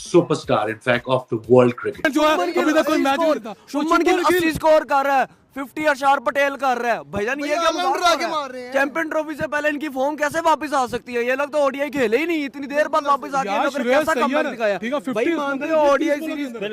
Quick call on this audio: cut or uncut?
cut